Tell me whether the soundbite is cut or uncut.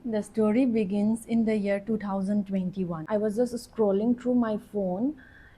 cut